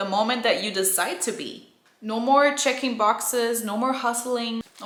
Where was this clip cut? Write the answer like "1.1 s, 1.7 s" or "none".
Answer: none